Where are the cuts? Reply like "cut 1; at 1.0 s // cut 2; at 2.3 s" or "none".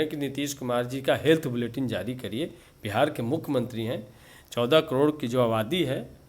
none

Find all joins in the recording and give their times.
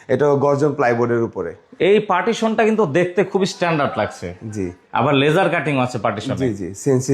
none

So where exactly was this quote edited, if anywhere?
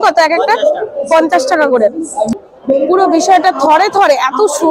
cut 1; at 2.3 s

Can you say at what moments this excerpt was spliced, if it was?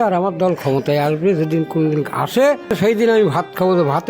cut 1; at 2.8 s

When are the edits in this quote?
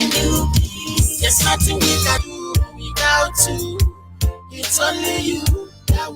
cut 1; at 2.2 s

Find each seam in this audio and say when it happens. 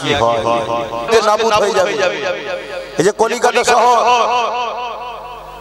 cut 1; at 1.1 s

